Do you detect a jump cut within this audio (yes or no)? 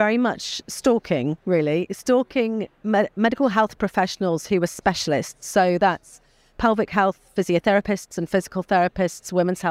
no